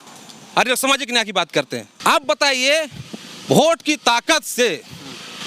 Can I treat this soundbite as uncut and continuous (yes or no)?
no